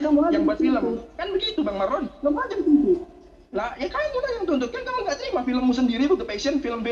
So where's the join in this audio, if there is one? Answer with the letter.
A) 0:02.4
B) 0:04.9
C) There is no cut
B